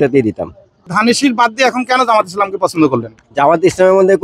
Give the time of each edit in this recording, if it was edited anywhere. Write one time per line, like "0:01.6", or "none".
0:00.9